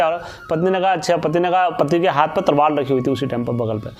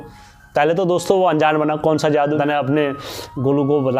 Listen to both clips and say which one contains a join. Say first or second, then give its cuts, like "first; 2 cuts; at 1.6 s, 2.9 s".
second; 1 cut; at 2.4 s